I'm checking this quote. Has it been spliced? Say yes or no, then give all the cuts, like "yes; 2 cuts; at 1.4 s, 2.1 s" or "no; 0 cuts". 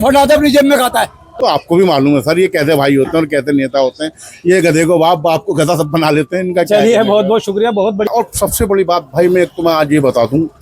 yes; 2 cuts; at 1.3 s, 8.1 s